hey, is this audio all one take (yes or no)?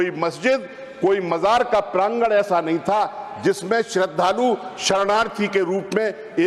yes